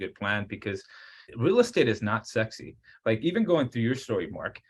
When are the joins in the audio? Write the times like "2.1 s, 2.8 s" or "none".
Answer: 1.2 s